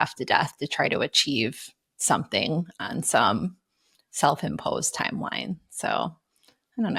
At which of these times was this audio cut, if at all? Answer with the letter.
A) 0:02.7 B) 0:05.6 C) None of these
C